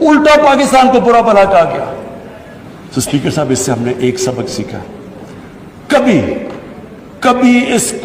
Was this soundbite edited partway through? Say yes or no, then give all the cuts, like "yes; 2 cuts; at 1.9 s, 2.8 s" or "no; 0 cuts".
no; 0 cuts